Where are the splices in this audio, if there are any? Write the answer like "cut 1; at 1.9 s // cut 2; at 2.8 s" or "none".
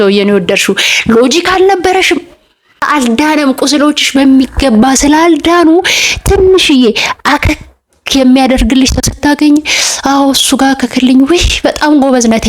cut 1; at 2.9 s